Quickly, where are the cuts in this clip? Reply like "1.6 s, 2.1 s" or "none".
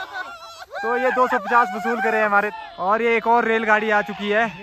2.5 s